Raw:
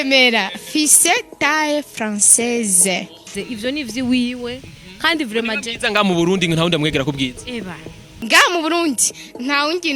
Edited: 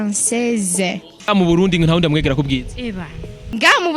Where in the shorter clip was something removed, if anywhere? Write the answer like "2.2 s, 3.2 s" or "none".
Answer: 1.3 s